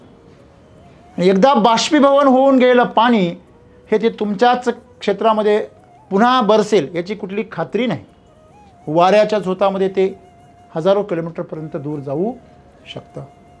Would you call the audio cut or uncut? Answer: uncut